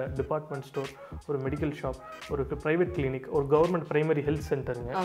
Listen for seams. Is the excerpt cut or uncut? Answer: uncut